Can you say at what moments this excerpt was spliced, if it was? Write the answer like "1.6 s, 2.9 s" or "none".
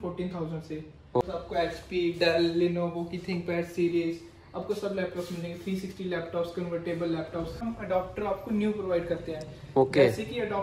1.2 s, 7.7 s